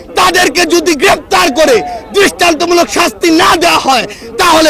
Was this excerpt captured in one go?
yes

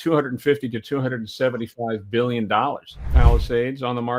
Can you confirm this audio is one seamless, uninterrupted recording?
no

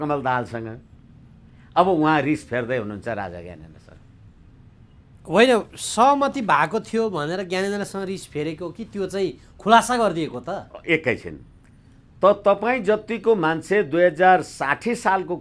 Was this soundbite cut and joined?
no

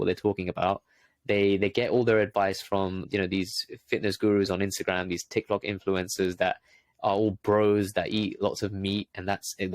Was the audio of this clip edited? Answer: no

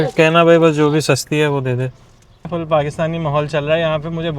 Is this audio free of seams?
no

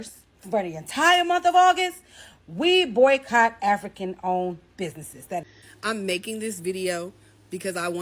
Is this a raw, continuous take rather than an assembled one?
no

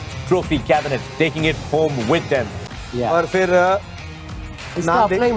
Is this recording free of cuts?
no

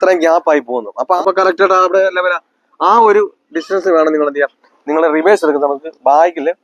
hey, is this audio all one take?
no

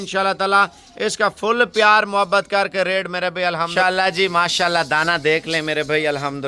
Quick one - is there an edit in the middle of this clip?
yes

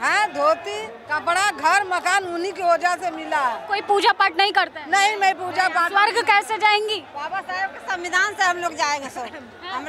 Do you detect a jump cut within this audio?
yes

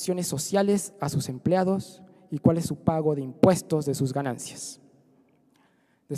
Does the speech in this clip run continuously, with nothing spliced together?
no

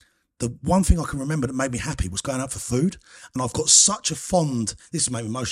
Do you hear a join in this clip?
no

